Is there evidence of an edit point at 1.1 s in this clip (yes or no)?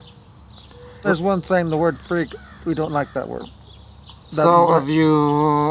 yes